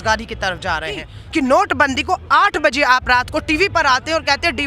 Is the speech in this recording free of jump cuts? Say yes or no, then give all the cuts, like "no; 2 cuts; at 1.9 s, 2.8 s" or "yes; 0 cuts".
no; 1 cut; at 1.1 s